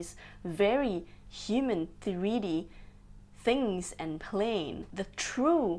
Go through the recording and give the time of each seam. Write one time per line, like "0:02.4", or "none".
0:04.8